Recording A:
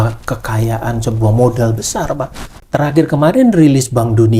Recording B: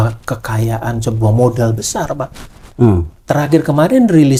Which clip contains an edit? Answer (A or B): A